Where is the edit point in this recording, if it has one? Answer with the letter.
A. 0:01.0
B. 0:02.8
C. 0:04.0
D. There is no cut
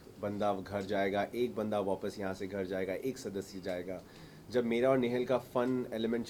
D